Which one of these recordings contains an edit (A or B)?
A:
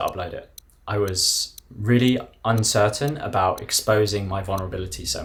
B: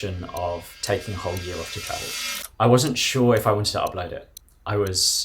B